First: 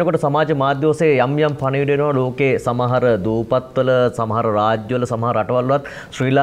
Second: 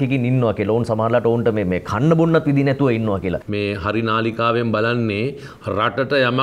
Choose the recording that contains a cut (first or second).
second